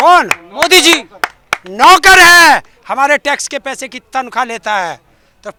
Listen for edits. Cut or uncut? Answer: uncut